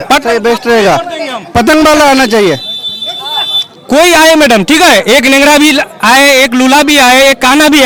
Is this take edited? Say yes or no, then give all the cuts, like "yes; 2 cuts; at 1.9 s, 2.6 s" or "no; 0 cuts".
no; 0 cuts